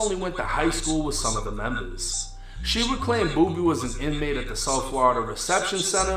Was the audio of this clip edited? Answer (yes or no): no